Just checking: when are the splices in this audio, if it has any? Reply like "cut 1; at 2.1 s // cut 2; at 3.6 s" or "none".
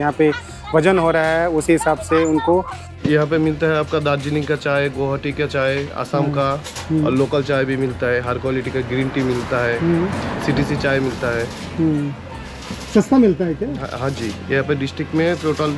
cut 1; at 2.8 s